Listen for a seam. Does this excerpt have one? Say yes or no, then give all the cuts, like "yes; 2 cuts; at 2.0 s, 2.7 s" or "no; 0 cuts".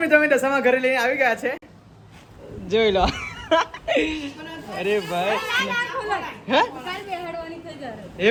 no; 0 cuts